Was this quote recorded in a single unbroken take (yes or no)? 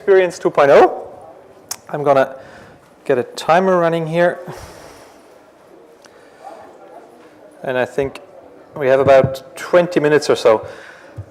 yes